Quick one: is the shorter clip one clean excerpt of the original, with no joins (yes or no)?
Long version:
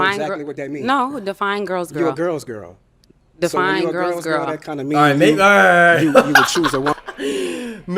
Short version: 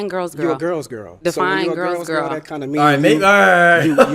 no